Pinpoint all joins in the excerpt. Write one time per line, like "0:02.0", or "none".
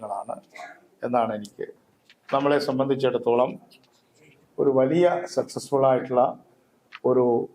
0:01.8